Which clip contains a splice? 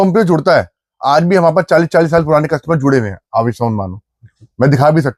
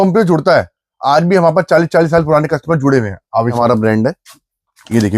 second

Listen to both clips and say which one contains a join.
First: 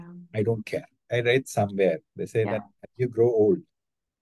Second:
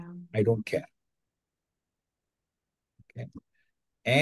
first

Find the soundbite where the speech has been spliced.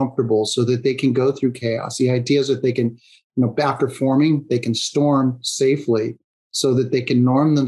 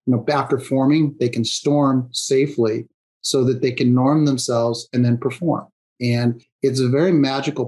second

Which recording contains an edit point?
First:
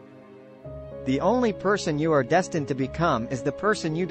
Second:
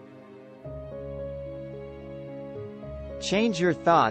first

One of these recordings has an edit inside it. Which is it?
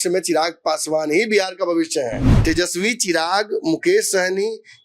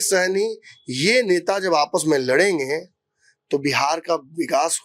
first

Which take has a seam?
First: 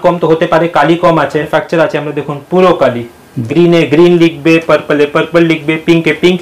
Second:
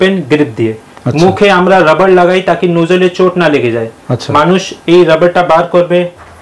first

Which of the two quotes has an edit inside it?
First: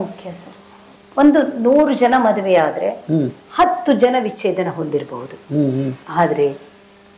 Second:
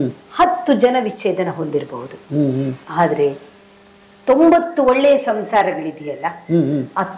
first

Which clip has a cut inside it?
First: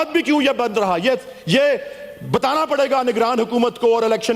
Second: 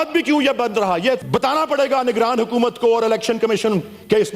second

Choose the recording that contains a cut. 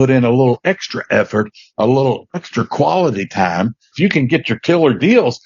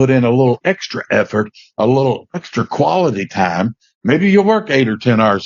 first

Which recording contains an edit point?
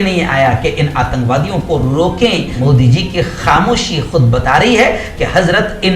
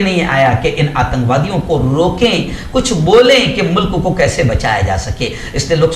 first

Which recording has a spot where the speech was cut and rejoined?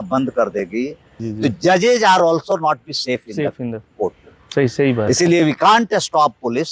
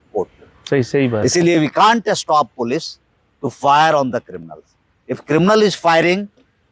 first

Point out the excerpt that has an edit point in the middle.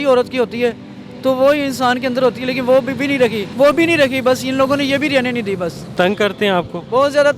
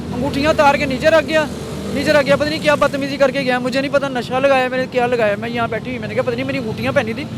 first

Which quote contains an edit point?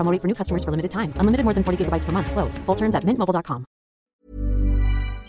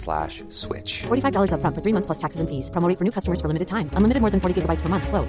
first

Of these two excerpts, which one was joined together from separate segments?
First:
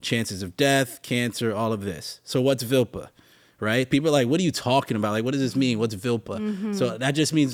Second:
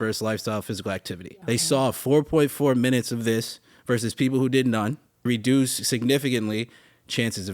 second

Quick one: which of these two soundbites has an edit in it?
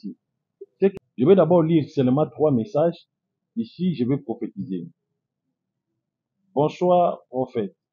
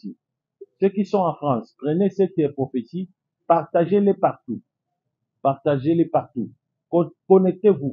first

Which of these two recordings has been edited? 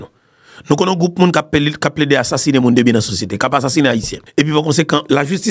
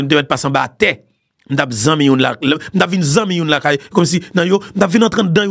first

